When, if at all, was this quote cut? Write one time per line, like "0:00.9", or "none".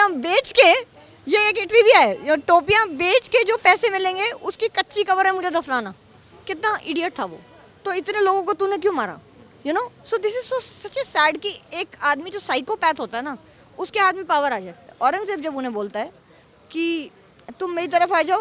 0:14.8